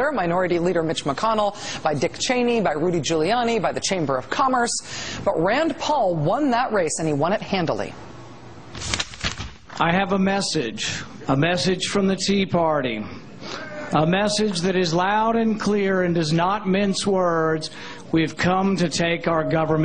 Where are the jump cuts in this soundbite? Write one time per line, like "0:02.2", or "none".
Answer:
none